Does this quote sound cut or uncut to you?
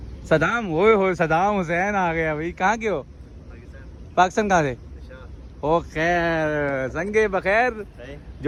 uncut